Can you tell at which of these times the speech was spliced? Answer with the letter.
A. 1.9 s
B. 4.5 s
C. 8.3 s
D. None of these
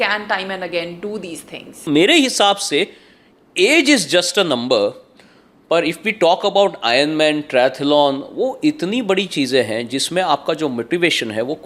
A